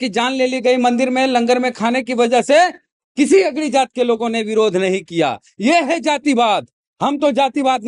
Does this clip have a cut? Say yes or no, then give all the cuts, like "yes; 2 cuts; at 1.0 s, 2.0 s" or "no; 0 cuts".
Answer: no; 0 cuts